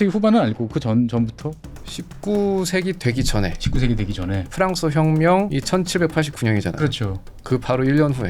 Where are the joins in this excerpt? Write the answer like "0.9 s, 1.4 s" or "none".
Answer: 5.5 s